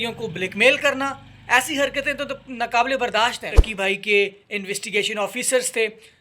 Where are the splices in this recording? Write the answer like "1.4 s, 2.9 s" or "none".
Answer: 3.6 s